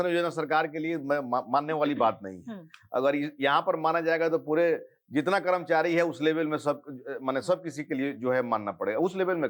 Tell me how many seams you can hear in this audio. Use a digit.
0